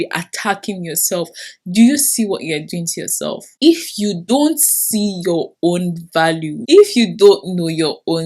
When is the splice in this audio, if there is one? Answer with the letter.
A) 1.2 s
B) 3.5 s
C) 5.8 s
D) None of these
D